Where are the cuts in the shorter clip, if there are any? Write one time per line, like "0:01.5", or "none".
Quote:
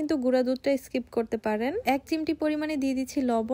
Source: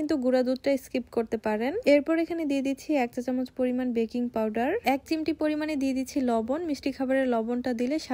0:01.8